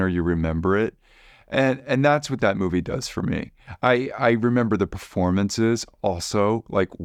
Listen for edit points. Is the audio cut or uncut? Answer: uncut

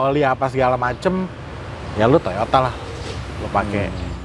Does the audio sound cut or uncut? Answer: uncut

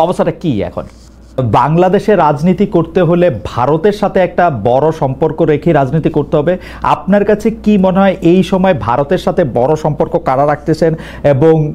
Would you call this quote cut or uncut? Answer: cut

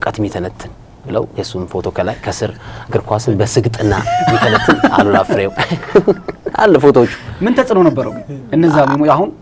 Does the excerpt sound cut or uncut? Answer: uncut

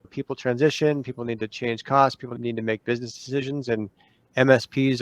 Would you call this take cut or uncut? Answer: cut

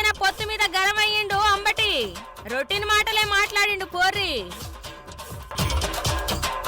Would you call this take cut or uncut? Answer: cut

